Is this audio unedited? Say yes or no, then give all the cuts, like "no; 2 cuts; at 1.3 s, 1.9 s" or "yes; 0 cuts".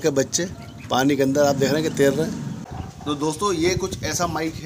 no; 1 cut; at 2.6 s